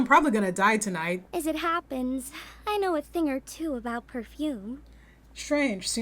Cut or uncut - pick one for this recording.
cut